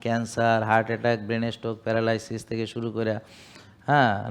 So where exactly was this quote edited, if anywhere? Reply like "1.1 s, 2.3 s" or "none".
none